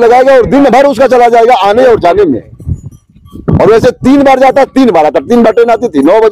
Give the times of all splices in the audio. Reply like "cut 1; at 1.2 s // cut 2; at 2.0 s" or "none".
none